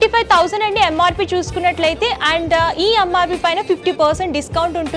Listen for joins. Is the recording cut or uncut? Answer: uncut